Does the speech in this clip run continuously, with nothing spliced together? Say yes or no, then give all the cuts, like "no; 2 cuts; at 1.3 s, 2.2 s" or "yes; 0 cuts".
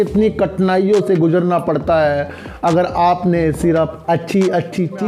yes; 0 cuts